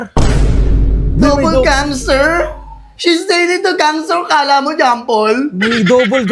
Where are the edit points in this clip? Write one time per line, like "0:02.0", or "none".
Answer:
none